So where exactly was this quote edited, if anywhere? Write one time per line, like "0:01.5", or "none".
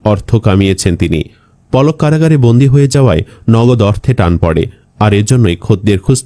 none